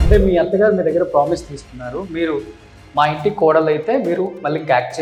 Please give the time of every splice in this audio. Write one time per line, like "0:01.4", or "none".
none